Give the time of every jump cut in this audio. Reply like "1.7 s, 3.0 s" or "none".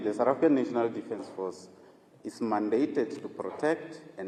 none